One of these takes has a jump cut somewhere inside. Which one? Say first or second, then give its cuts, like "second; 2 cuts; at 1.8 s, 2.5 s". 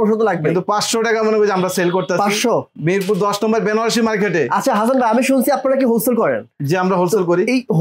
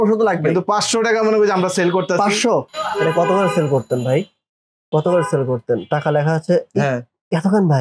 second; 1 cut; at 2.7 s